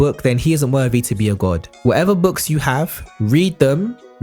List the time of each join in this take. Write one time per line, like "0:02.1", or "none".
0:01.7